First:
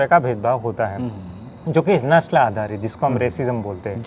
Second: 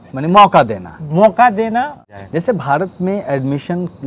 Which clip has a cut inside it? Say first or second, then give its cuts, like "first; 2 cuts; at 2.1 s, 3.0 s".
second; 1 cut; at 2.0 s